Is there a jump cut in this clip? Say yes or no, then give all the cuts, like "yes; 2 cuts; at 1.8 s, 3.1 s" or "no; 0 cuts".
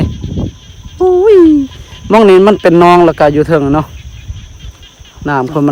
no; 0 cuts